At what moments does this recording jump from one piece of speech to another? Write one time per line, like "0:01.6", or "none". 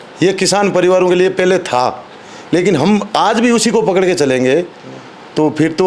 none